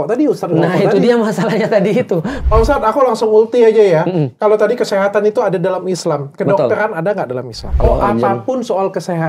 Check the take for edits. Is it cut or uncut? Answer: cut